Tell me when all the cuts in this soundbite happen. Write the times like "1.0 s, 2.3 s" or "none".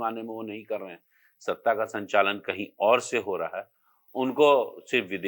none